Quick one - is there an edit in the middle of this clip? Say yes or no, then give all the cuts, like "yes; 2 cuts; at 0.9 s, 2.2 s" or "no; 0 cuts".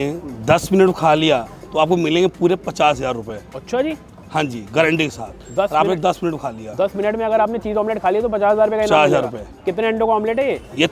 no; 0 cuts